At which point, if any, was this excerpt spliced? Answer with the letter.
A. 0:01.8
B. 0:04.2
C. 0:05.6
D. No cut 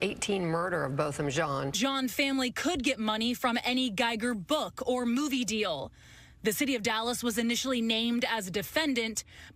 A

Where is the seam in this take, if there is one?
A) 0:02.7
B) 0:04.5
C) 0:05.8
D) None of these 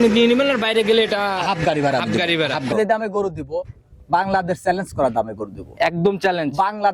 A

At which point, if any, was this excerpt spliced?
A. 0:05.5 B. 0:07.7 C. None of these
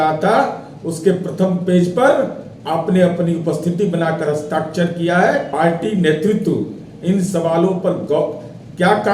A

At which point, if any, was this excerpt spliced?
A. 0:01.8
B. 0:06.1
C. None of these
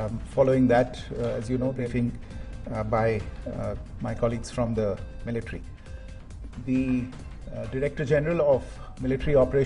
A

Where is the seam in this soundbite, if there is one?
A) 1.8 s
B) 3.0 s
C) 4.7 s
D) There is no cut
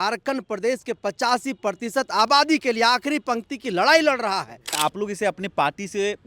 C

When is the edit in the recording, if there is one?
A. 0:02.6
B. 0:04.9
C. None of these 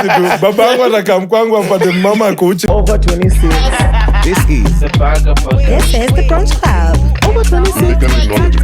A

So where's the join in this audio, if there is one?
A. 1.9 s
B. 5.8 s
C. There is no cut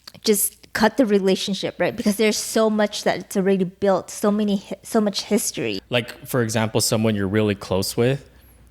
B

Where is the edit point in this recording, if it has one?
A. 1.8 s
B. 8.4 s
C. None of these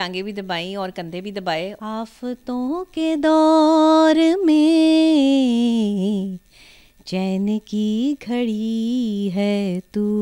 A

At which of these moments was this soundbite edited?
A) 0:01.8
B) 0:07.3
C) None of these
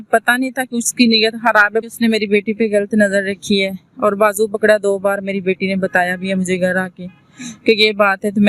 A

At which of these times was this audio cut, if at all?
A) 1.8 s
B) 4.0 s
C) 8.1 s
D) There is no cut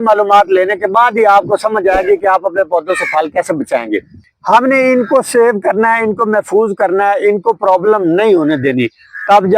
B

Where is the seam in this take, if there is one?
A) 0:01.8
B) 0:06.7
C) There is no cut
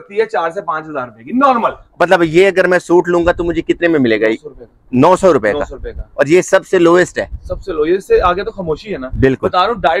A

